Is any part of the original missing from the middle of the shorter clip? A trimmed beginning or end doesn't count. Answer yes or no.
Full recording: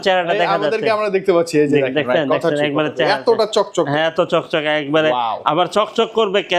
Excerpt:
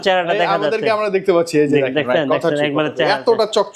no